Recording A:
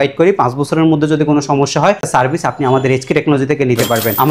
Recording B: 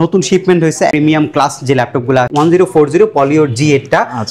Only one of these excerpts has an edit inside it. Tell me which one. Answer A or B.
B